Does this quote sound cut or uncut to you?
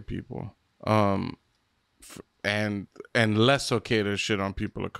uncut